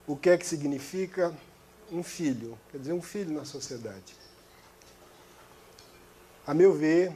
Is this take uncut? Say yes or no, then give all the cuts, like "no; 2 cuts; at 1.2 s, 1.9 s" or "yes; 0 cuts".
yes; 0 cuts